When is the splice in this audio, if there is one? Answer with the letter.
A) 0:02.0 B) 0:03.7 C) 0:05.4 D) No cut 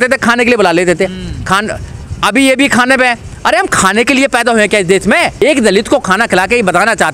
C